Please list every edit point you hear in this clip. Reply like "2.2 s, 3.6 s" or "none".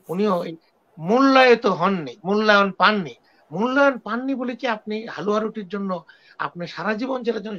none

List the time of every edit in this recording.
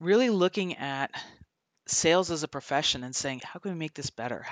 3.4 s

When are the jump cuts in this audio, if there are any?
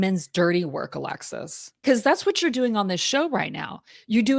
1.8 s

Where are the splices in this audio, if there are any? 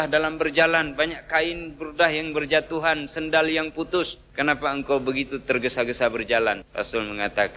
4.2 s, 6.7 s

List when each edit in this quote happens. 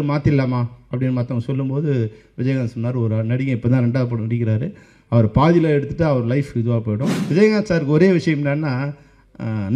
7.1 s

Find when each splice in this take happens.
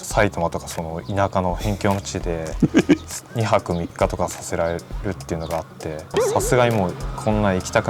none

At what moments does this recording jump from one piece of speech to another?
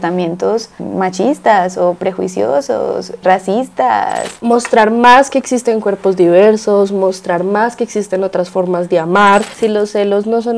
4.3 s, 9.5 s

